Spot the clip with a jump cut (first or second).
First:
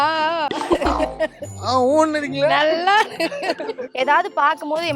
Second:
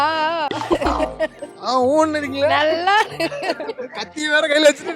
first